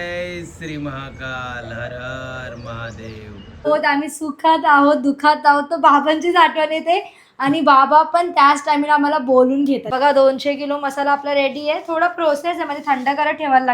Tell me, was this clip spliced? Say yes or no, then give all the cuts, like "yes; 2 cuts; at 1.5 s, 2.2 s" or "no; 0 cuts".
yes; 2 cuts; at 3.7 s, 9.9 s